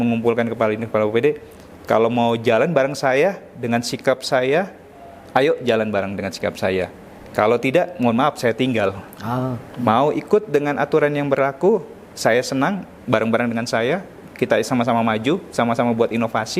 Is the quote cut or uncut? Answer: cut